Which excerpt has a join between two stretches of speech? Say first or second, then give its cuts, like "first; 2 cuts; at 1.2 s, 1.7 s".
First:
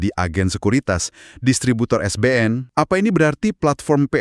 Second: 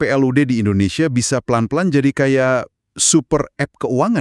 first; 1 cut; at 2.6 s